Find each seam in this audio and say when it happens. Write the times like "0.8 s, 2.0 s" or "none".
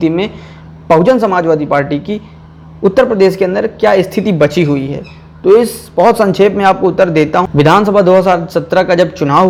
none